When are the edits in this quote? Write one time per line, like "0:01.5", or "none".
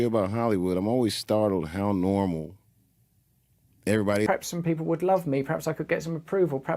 0:04.3